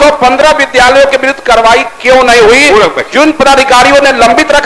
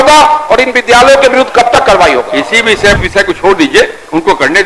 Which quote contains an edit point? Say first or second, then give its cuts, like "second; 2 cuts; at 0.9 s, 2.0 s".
second; 1 cut; at 3.0 s